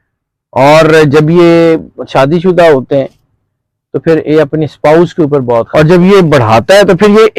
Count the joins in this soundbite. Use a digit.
1